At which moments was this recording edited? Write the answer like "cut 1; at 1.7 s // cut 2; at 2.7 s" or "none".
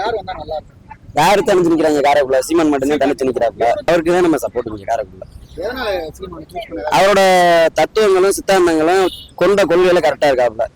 cut 1; at 3.9 s